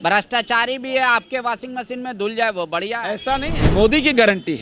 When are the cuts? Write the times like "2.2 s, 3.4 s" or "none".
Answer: 3.5 s